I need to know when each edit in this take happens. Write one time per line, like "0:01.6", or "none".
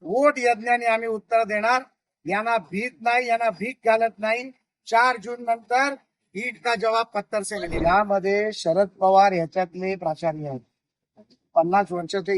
0:07.8